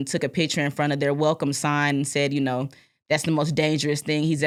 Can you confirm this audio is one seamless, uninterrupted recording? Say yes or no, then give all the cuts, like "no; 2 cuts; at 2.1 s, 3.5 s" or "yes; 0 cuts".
yes; 0 cuts